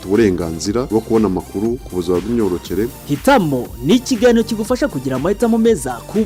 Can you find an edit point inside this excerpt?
no; 0 cuts

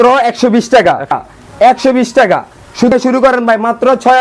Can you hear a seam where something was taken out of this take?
yes; 2 cuts; at 1.1 s, 2.9 s

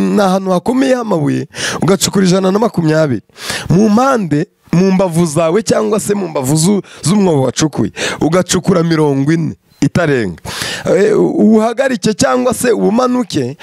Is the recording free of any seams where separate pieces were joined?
yes; 0 cuts

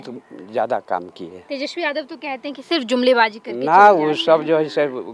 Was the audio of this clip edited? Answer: no; 0 cuts

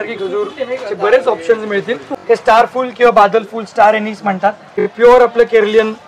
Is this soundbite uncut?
no; 2 cuts; at 2.1 s, 4.8 s

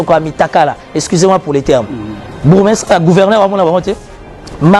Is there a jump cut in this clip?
no; 0 cuts

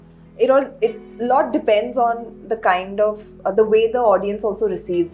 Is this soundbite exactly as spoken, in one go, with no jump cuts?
yes; 0 cuts

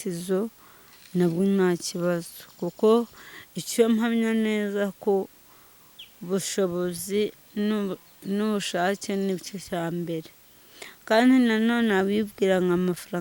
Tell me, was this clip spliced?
no; 0 cuts

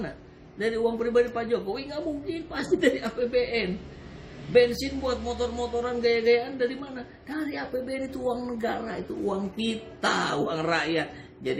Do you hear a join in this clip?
no; 0 cuts

